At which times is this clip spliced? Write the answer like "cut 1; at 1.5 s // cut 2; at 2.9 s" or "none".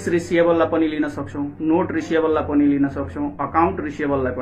none